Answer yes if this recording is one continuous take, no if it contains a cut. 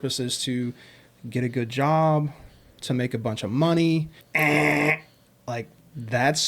no